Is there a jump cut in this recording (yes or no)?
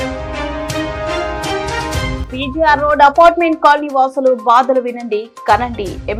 no